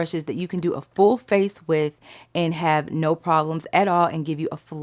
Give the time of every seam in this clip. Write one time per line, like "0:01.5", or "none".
none